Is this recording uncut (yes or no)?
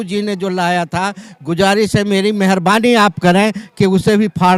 yes